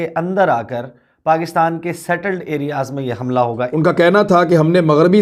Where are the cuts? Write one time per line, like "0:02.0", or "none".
0:03.6